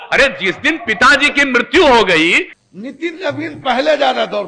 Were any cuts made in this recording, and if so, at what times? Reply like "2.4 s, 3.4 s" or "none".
2.5 s